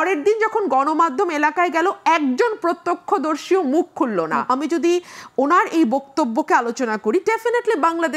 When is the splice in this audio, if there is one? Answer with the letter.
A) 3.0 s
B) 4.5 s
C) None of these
B